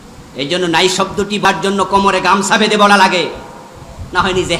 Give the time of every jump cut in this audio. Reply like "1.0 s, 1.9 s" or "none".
1.4 s